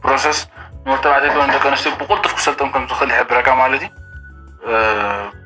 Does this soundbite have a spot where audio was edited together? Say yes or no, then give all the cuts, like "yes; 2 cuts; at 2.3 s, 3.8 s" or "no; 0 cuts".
no; 0 cuts